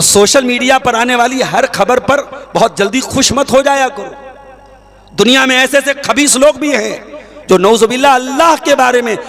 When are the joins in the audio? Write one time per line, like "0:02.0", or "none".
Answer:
none